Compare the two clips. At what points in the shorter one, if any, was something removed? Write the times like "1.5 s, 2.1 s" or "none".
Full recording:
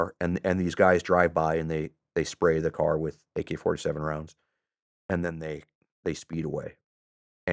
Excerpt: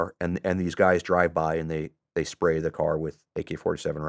none